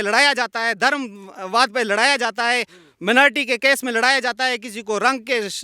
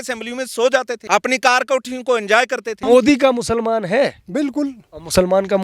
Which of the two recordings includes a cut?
second; 2 cuts; at 1.0 s, 2.8 s

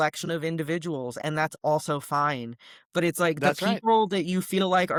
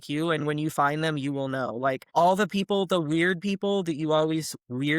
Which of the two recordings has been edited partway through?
second; 1 cut; at 2.0 s

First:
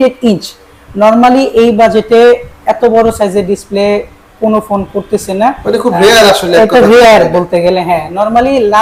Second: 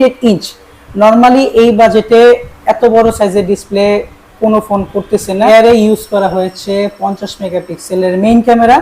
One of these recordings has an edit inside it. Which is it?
second; 1 cut; at 5.5 s

